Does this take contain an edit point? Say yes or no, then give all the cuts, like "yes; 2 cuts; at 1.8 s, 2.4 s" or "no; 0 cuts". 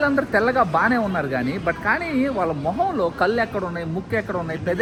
no; 0 cuts